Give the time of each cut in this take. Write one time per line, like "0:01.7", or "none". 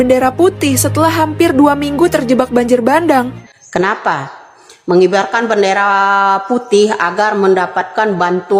0:03.3